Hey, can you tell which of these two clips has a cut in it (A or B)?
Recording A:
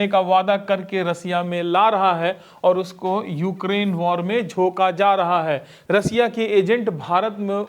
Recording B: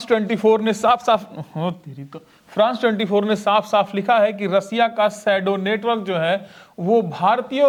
A